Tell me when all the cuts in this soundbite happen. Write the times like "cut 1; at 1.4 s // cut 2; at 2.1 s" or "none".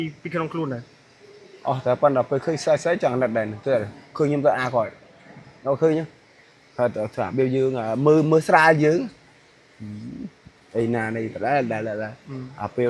none